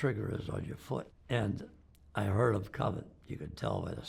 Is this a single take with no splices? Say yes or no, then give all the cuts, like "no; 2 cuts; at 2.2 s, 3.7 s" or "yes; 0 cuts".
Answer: no; 1 cut; at 1.2 s